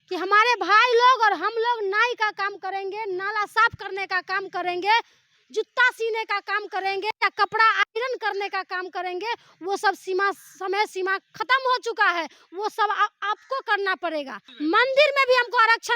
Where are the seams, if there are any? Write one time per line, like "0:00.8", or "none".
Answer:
0:14.4